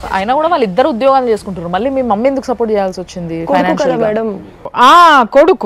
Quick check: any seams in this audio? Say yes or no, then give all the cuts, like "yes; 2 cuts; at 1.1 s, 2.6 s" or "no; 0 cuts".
no; 0 cuts